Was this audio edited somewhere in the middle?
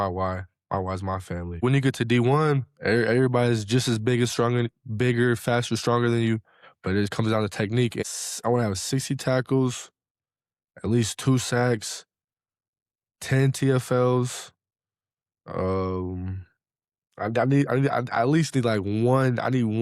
yes; 2 cuts; at 1.6 s, 8.0 s

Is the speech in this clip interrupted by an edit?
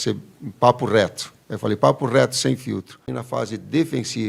yes; 1 cut; at 3.2 s

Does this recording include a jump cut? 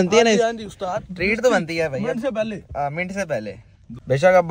no; 0 cuts

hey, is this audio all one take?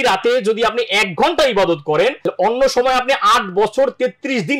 no; 1 cut; at 2.2 s

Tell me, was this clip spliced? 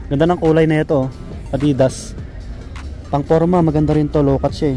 no; 0 cuts

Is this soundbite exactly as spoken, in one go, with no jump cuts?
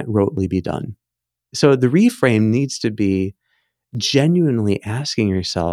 no; 1 cut; at 1.5 s

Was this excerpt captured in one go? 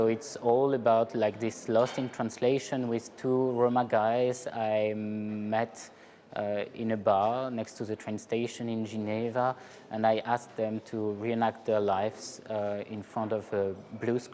yes; 0 cuts

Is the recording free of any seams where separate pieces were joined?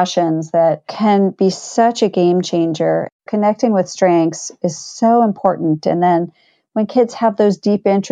no; 2 cuts; at 0.9 s, 3.1 s

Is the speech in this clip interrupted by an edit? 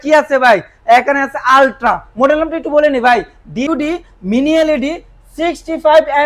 yes; 1 cut; at 3.7 s

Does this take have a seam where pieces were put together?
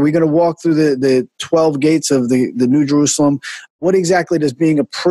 yes; 1 cut; at 3.7 s

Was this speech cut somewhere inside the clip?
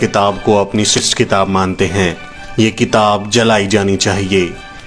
yes; 1 cut; at 1.0 s

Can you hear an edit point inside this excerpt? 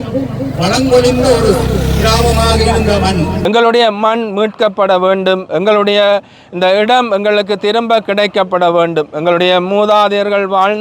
yes; 1 cut; at 3.4 s

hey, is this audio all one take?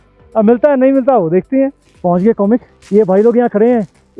no; 2 cuts; at 1.9 s, 2.8 s

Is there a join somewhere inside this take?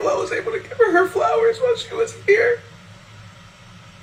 no; 0 cuts

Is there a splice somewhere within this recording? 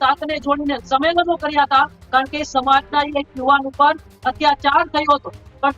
no; 0 cuts

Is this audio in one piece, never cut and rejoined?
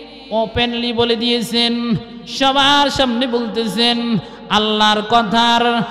yes; 0 cuts

